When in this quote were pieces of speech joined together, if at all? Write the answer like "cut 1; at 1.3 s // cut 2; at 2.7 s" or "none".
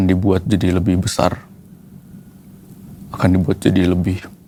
none